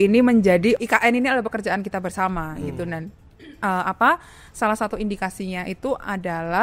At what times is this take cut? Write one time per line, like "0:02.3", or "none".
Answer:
none